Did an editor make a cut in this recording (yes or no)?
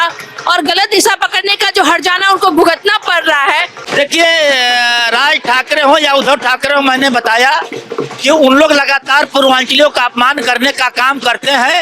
yes